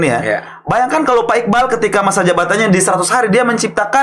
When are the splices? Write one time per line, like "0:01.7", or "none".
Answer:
none